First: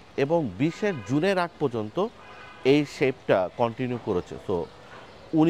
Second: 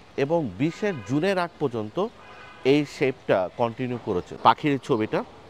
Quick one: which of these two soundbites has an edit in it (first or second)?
second